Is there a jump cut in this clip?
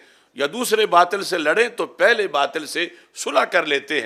no; 0 cuts

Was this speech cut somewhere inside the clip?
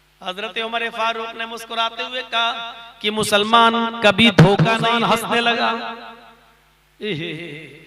yes; 1 cut; at 4.9 s

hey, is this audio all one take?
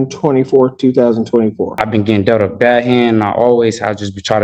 no; 1 cut; at 1.7 s

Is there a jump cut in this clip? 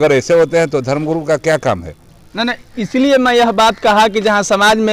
no; 0 cuts

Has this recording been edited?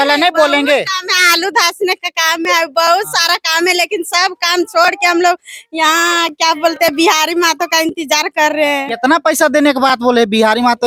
no; 0 cuts

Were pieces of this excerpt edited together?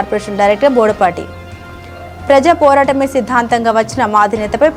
no; 0 cuts

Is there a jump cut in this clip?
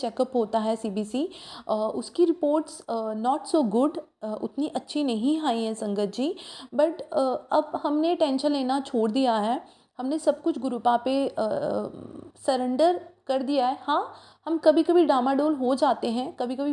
no; 0 cuts

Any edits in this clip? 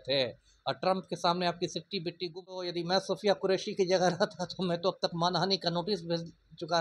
yes; 1 cut; at 2.7 s

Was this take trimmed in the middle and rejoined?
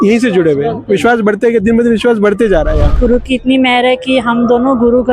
yes; 1 cut; at 2.9 s

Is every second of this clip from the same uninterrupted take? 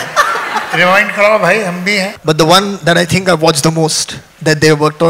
no; 1 cut; at 2.1 s

